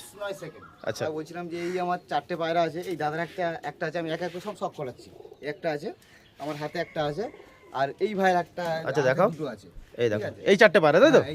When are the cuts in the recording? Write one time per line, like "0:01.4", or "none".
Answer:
0:01.1

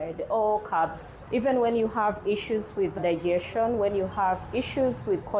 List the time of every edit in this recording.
0:01.1

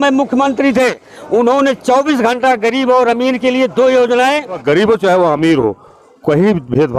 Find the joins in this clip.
0:04.6

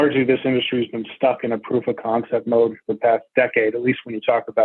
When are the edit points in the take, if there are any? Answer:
none

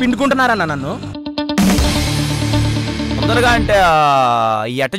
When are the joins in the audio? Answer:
none

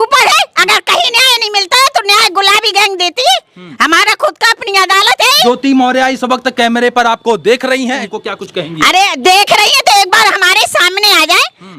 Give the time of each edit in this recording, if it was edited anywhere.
0:05.5
0:08.1

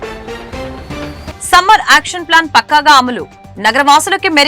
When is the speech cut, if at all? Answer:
0:01.3

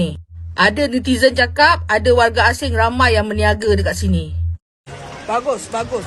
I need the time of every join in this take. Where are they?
0:04.6

